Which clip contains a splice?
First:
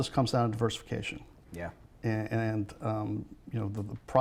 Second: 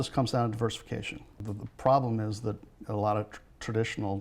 second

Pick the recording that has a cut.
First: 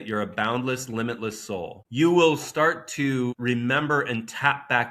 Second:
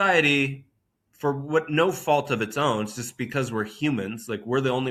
first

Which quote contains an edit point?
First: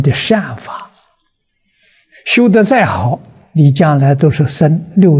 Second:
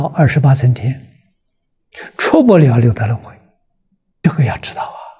second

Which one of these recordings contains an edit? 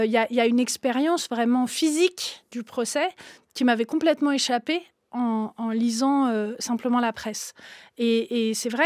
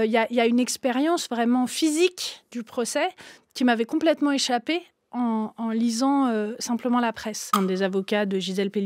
second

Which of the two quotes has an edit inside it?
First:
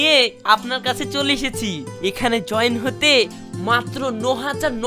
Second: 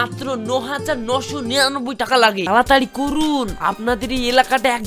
second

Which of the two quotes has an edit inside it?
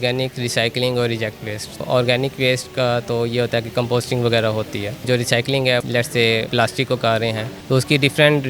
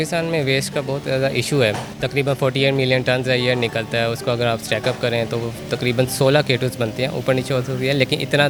first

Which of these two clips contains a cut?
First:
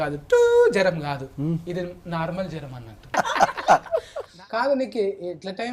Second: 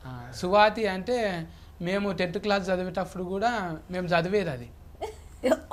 first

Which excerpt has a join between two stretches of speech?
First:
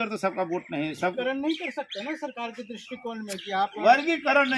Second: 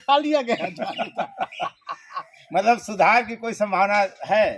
first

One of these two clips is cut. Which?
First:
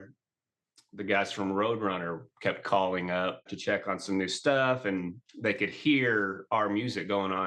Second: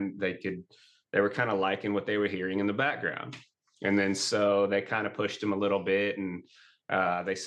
first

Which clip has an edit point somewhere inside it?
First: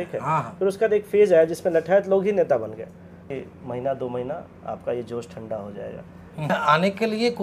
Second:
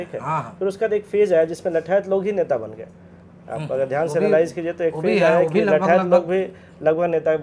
first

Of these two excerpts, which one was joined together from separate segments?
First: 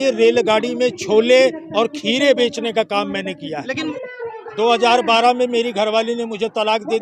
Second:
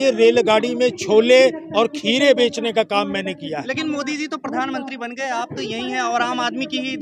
first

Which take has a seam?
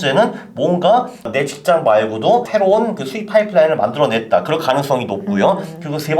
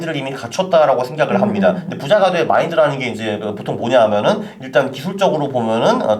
first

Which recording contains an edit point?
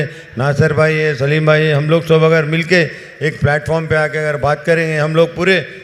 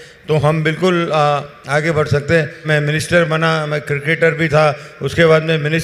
second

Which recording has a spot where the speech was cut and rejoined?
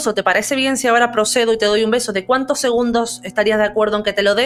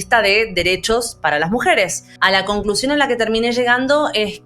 second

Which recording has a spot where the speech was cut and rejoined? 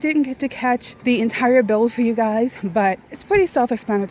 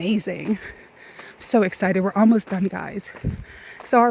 first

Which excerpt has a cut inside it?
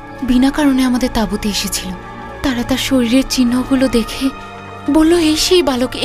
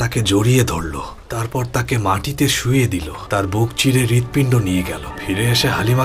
second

